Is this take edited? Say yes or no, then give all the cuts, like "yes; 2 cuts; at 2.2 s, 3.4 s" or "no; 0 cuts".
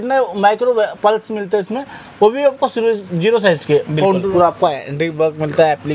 yes; 1 cut; at 4.3 s